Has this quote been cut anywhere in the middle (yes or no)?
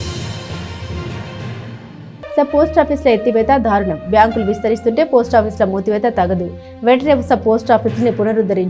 yes